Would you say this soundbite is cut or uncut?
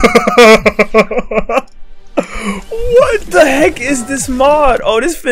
uncut